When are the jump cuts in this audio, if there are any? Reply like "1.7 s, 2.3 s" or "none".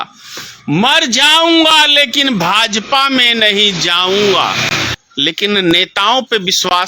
5.0 s